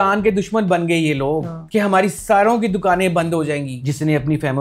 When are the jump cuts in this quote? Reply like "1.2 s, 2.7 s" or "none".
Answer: 1.5 s, 3.7 s